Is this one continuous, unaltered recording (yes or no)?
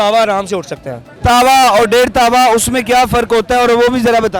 yes